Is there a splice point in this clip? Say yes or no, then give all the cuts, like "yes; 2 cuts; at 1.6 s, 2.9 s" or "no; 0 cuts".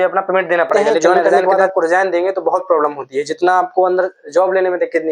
yes; 1 cut; at 1.2 s